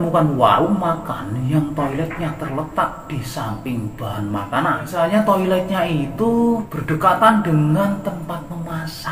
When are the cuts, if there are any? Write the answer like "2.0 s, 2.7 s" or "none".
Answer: 4.8 s, 6.7 s